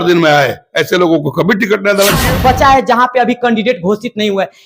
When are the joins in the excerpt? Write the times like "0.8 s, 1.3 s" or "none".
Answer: 2.2 s